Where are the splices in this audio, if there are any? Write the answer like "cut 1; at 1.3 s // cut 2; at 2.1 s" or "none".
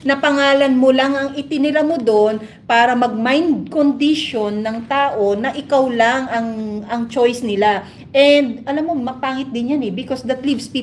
none